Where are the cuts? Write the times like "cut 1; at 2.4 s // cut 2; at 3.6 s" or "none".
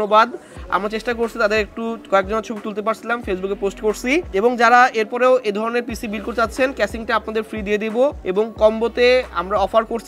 cut 1; at 4.3 s // cut 2; at 8.2 s